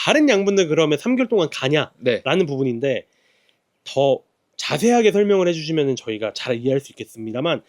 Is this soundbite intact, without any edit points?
yes; 0 cuts

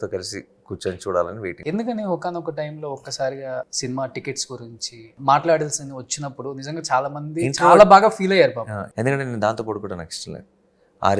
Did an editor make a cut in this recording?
yes; 2 cuts; at 1.6 s, 8.9 s

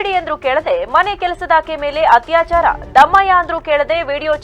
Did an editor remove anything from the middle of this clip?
no; 0 cuts

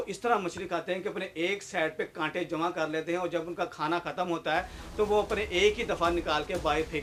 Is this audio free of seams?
yes; 0 cuts

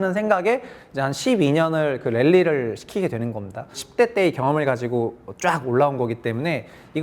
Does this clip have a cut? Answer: yes; 1 cut; at 3.8 s

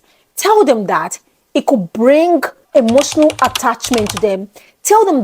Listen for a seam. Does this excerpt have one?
yes; 1 cut; at 2.6 s

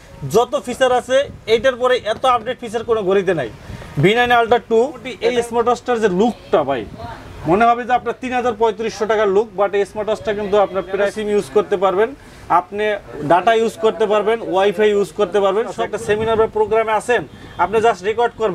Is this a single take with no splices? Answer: no; 3 cuts; at 5.1 s, 11.2 s, 15.8 s

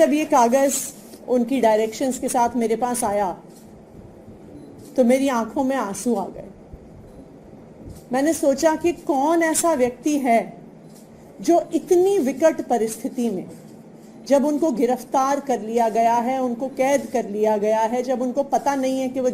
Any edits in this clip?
no; 0 cuts

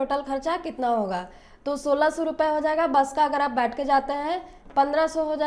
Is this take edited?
no; 0 cuts

